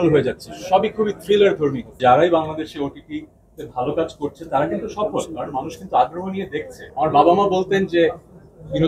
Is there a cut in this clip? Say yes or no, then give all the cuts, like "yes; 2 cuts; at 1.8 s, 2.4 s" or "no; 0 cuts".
yes; 2 cuts; at 2.0 s, 6.8 s